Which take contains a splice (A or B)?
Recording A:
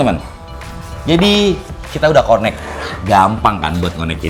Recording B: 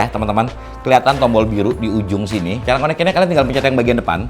B